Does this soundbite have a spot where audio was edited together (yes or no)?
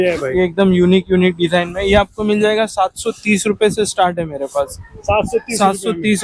no